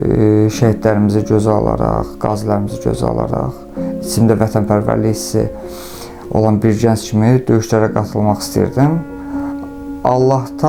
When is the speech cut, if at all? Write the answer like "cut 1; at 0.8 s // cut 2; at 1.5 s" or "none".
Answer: none